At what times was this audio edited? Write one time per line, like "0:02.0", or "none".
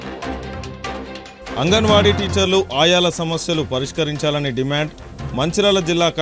0:00.9